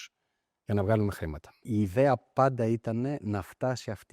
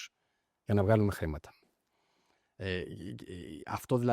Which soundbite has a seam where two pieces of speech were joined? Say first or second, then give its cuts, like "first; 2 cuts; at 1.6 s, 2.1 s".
first; 1 cut; at 1.6 s